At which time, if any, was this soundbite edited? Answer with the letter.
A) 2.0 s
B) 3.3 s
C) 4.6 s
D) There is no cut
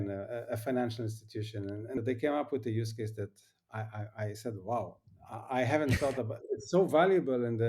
A